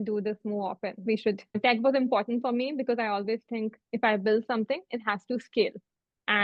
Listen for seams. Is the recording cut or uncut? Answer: cut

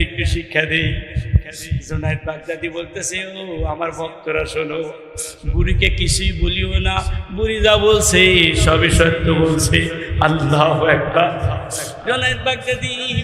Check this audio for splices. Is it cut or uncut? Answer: uncut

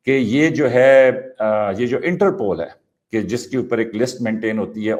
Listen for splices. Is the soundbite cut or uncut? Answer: uncut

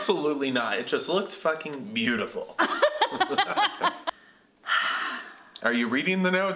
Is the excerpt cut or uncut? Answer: cut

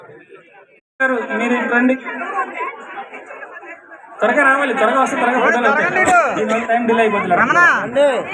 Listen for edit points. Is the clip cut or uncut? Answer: cut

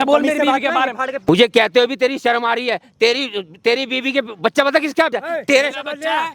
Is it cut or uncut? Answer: cut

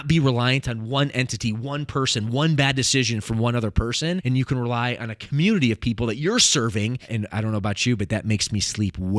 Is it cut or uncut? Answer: cut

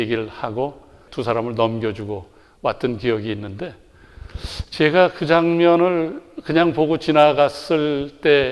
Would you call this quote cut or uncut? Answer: cut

